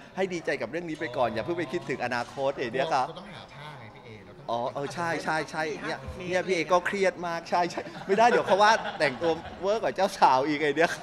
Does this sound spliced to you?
no; 0 cuts

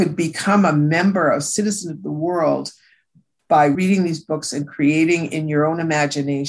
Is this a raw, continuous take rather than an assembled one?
no; 1 cut; at 3.8 s

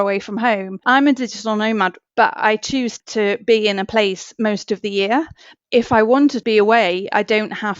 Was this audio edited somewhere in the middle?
yes; 5 cuts; at 0.8 s, 2.0 s, 3.0 s, 5.5 s, 6.4 s

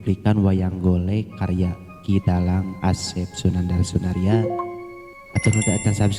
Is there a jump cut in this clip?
no; 0 cuts

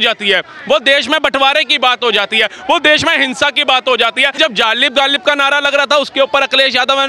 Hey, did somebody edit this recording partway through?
yes; 1 cut; at 4.4 s

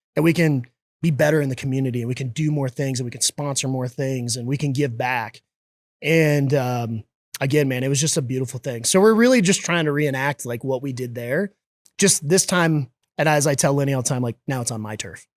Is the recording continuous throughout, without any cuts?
yes; 0 cuts

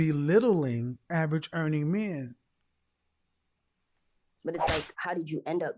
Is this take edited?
no; 0 cuts

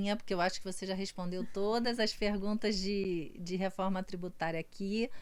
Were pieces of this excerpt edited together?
no; 0 cuts

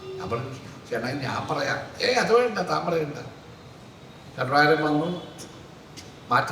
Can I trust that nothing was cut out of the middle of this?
yes; 0 cuts

